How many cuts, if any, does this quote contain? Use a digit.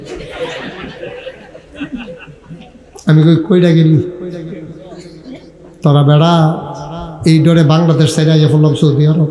0